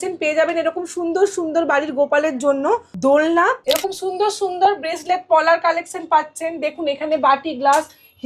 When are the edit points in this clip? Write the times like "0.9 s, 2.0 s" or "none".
2.9 s, 3.6 s